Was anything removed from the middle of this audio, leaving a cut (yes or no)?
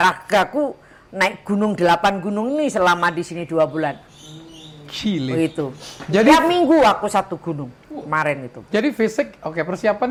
no